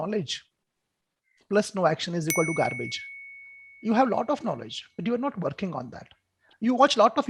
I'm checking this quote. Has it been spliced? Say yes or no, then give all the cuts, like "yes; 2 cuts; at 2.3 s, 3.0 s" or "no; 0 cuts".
no; 0 cuts